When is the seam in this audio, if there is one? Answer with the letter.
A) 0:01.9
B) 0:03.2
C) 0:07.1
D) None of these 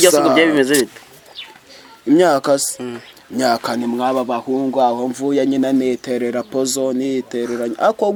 D